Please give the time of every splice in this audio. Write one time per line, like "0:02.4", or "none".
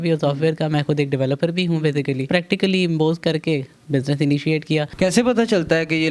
0:02.3
0:04.9